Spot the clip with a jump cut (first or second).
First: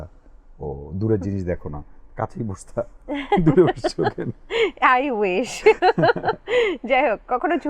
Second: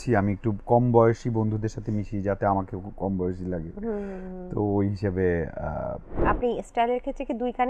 second